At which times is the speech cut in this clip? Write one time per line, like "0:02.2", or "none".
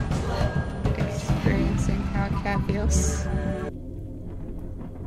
0:03.7